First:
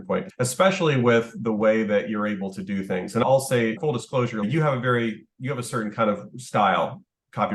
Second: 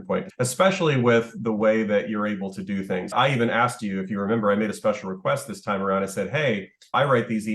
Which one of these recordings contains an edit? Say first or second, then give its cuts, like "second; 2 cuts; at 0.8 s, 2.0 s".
second; 1 cut; at 3.1 s